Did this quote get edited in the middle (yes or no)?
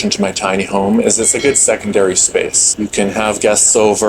yes